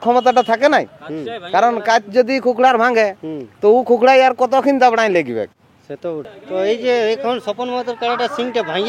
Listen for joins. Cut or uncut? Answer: cut